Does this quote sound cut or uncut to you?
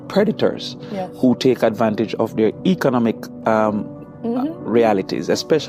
uncut